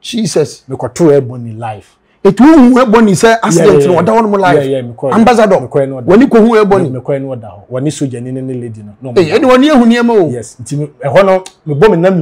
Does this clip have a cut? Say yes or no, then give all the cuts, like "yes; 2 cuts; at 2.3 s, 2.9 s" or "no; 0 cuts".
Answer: no; 0 cuts